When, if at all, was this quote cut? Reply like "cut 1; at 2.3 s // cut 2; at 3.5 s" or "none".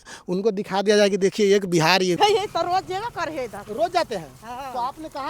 cut 1; at 2.2 s